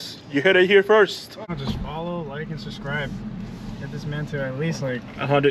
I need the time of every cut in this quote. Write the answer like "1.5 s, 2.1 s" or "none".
1.3 s